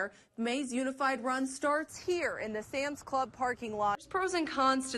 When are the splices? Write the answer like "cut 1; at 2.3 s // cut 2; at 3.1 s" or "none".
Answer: cut 1; at 4.0 s